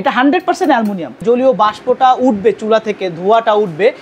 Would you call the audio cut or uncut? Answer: cut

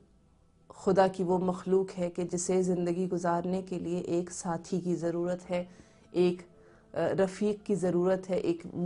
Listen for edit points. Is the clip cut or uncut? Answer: uncut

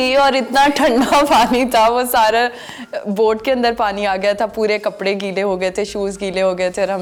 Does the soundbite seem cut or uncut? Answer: uncut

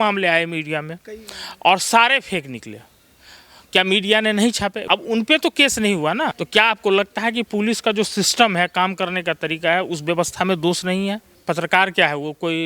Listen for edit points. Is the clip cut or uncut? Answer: cut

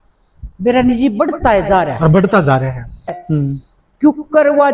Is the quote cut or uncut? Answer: cut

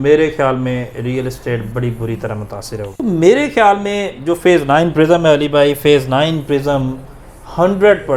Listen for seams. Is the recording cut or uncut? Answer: cut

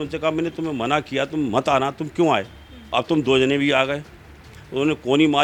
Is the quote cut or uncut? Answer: uncut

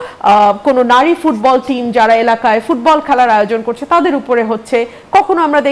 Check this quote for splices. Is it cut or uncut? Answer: uncut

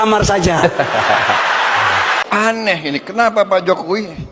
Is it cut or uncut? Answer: cut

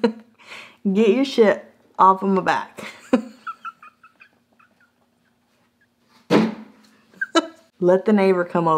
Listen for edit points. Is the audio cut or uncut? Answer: cut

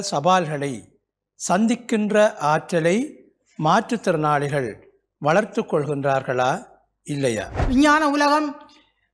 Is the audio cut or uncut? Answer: cut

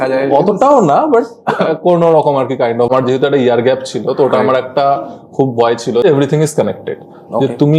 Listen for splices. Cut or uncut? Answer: cut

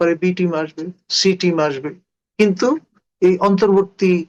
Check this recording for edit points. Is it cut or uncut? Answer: uncut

